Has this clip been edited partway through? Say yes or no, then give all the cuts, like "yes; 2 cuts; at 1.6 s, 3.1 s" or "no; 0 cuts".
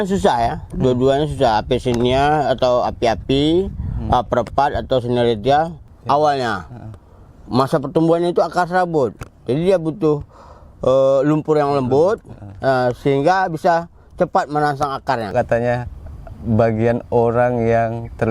yes; 2 cuts; at 5.9 s, 15.3 s